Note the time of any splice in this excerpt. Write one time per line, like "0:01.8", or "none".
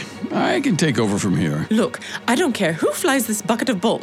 0:01.6

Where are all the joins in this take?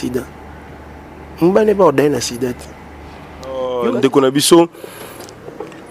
0:03.7

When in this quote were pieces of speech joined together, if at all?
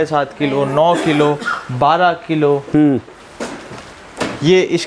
none

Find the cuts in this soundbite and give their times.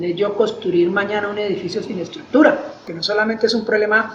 0:02.9

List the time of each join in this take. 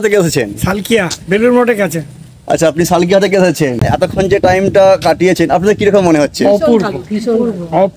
0:03.9

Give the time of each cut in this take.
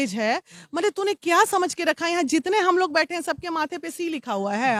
none

